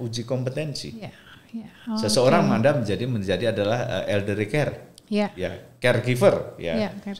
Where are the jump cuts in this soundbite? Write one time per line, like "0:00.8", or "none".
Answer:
none